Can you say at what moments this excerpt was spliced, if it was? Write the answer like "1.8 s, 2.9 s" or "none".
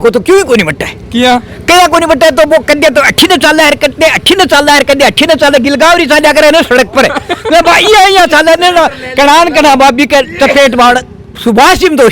none